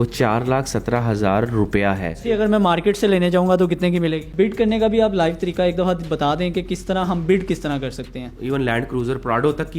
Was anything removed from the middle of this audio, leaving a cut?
yes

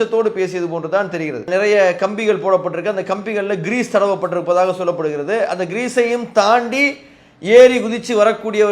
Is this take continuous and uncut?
no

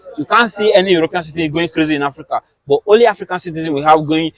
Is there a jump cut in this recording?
no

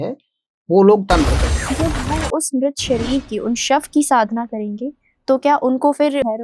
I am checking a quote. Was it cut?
yes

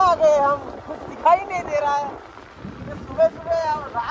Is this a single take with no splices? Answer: yes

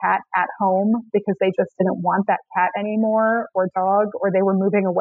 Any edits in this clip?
no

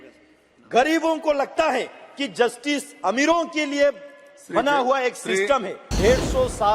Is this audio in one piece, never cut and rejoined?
no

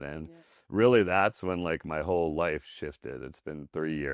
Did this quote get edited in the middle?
no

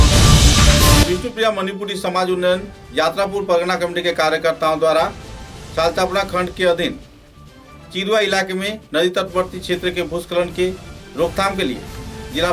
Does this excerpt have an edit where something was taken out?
yes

